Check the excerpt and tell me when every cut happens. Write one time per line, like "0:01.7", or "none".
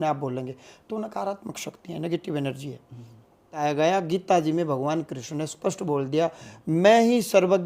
0:03.6